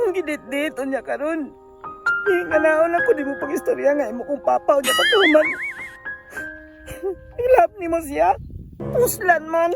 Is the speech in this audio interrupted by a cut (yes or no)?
yes